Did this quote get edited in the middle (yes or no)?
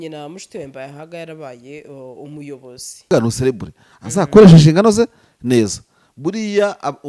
yes